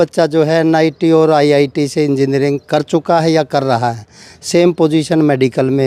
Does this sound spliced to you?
no; 0 cuts

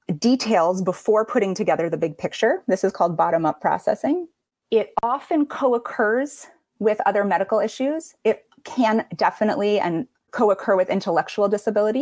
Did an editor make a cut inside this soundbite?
no; 0 cuts

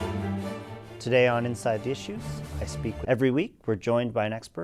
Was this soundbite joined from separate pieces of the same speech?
no; 0 cuts

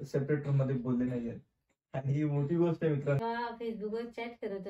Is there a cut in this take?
yes; 1 cut; at 3.2 s

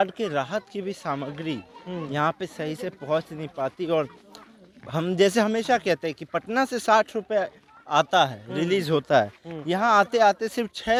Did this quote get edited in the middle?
no; 0 cuts

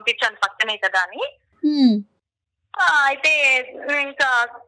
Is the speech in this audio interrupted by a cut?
no; 0 cuts

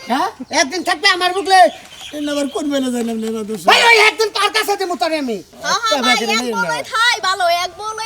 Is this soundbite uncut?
no; 1 cut; at 5.5 s

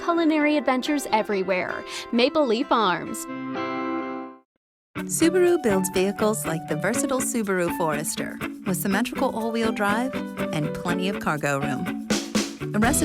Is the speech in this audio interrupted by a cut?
no; 0 cuts

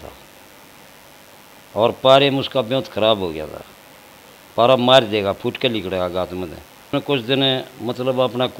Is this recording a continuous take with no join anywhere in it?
no; 1 cut; at 6.9 s

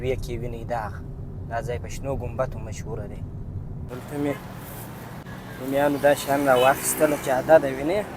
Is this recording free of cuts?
no; 2 cuts; at 3.9 s, 5.2 s

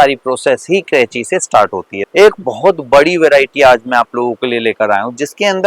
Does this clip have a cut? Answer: yes; 1 cut; at 2.0 s

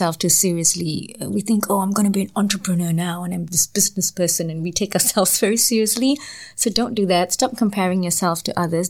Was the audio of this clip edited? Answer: no; 0 cuts

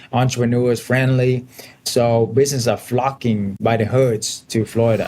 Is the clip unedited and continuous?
no; 1 cut; at 3.6 s

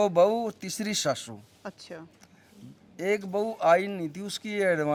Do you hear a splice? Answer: no; 0 cuts

